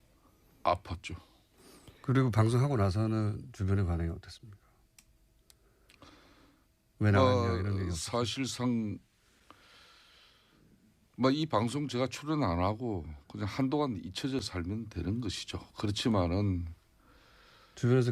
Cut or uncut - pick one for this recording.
uncut